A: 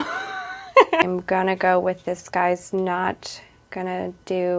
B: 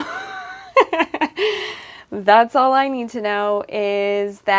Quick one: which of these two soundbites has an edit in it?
A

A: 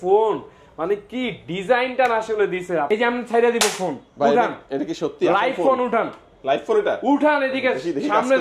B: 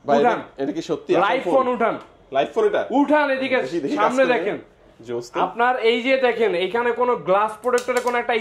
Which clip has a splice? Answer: A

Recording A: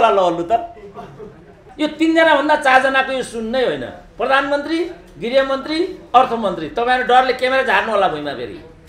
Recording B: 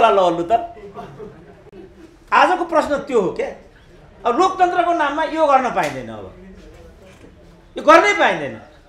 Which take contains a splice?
A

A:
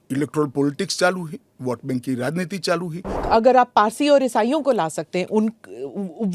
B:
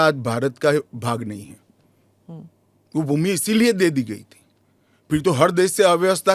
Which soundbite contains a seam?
A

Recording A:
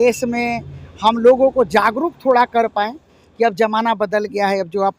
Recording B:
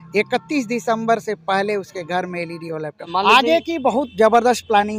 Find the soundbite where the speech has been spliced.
B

